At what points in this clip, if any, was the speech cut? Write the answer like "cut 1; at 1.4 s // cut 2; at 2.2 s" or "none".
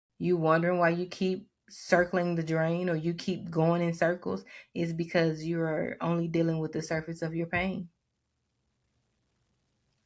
none